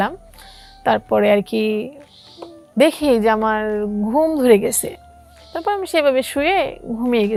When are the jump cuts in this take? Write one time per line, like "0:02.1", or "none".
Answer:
none